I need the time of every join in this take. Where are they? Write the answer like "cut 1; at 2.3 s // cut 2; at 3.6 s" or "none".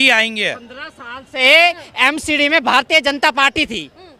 none